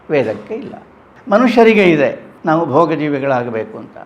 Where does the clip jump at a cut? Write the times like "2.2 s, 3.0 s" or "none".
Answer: 2.3 s